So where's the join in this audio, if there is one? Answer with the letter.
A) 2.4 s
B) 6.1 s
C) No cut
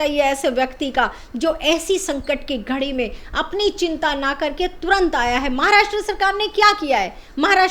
C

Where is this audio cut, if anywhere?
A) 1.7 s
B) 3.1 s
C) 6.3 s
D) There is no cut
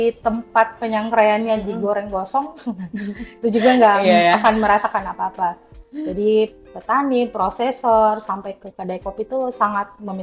D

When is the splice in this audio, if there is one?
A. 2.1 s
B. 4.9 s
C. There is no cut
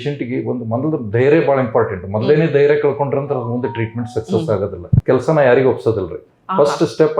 B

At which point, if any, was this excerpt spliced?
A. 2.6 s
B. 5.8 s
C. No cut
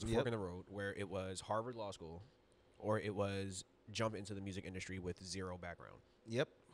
C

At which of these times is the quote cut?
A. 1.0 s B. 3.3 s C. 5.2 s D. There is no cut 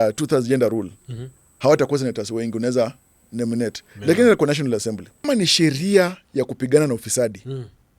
C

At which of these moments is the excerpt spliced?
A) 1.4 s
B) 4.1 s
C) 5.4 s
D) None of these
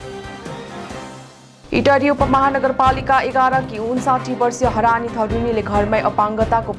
A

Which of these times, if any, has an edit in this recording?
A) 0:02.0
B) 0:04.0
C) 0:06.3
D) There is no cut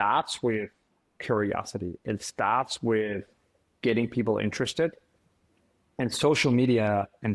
D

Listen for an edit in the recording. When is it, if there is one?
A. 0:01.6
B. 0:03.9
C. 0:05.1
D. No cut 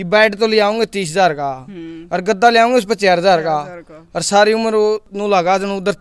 C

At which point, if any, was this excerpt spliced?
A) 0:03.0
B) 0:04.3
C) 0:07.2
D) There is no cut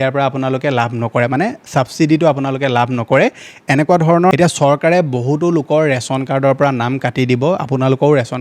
B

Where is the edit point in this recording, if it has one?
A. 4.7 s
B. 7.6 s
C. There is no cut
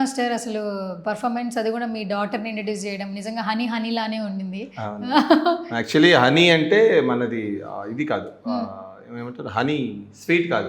C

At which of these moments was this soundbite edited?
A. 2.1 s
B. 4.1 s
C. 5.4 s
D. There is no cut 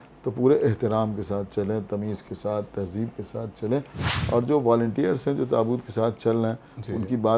B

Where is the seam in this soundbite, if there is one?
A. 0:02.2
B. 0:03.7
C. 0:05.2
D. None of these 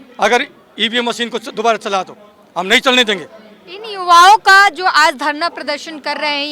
D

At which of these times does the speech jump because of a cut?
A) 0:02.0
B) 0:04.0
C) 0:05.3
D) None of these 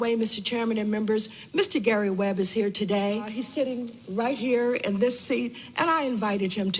D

